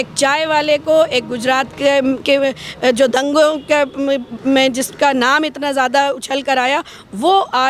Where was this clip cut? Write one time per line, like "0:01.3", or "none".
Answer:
none